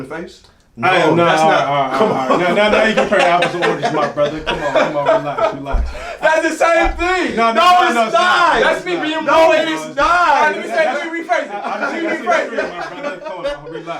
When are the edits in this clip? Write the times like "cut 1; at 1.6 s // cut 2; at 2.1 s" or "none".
none